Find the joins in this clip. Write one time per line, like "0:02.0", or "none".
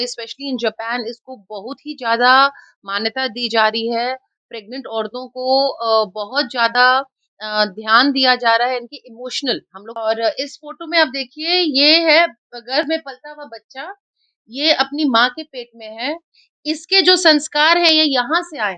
0:09.8